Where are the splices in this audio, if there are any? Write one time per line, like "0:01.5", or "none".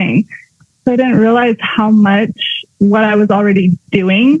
none